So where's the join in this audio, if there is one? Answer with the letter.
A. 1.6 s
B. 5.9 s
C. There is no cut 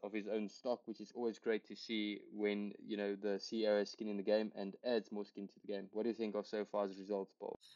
C